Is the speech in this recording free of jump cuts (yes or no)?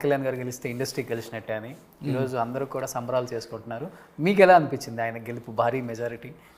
yes